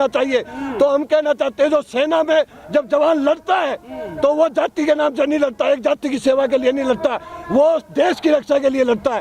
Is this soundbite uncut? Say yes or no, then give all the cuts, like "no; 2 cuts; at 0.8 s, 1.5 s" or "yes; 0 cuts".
yes; 0 cuts